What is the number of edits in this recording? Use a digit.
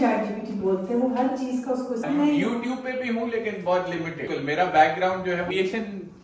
3